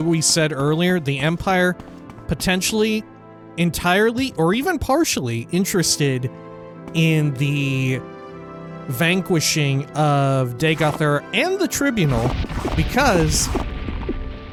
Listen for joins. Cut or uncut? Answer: uncut